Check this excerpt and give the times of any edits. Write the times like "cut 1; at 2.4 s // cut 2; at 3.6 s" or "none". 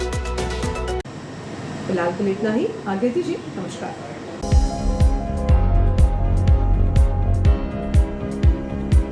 none